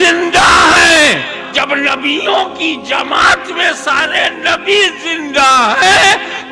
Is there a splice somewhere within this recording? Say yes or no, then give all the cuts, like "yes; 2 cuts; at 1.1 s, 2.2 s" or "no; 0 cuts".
yes; 1 cut; at 1.5 s